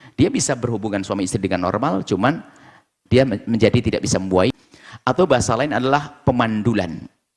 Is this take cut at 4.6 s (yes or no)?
yes